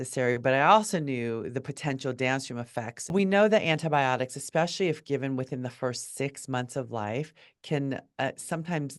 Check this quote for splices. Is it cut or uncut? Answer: cut